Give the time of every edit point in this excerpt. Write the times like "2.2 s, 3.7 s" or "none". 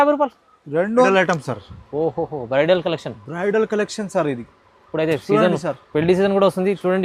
1.1 s